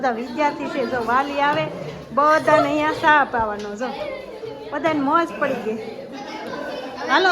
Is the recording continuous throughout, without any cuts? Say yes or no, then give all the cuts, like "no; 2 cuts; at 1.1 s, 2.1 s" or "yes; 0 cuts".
yes; 0 cuts